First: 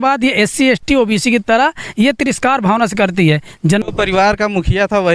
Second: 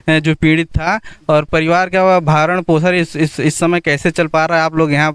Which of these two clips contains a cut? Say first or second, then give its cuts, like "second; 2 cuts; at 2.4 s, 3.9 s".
first; 1 cut; at 3.8 s